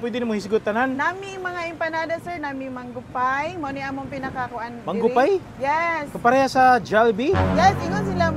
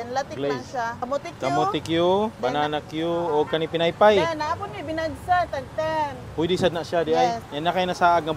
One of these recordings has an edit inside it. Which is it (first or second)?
second